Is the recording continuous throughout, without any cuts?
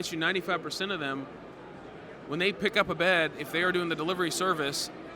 yes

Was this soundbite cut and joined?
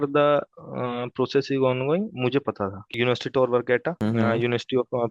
yes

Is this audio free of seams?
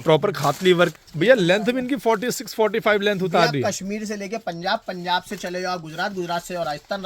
no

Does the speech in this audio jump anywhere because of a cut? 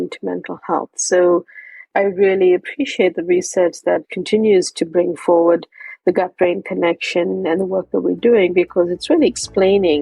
yes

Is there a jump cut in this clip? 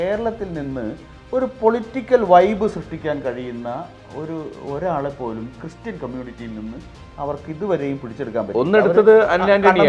no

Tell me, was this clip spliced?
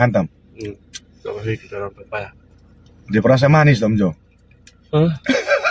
no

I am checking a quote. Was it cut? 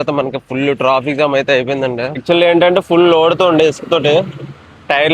yes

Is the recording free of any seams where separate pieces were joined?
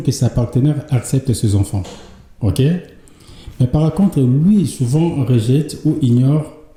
yes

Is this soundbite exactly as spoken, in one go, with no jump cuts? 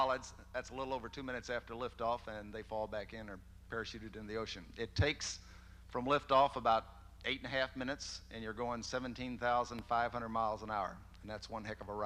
no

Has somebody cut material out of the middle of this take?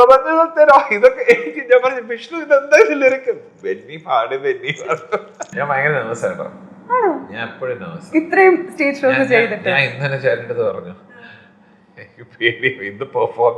yes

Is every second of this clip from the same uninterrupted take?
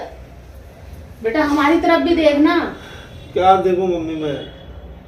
yes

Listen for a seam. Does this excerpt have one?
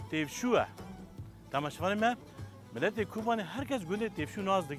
no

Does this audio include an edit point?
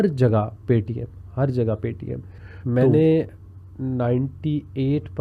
yes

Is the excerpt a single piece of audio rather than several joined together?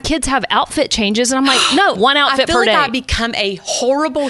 no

